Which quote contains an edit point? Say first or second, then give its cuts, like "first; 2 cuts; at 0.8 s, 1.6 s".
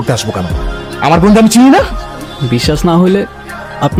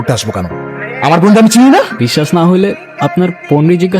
second; 2 cuts; at 2.0 s, 2.9 s